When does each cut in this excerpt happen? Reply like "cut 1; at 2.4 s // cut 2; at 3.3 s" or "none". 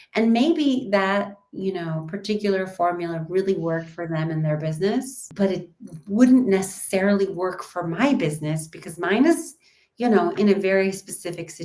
cut 1; at 5.2 s